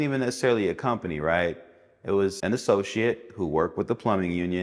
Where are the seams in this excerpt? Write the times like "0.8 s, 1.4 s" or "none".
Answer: 2.4 s